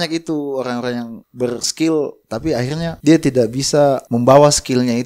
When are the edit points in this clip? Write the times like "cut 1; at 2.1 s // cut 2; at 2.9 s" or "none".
cut 1; at 1.2 s // cut 2; at 2.9 s // cut 3; at 4.1 s